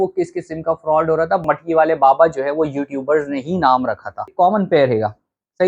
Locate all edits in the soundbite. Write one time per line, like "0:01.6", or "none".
0:01.4
0:04.3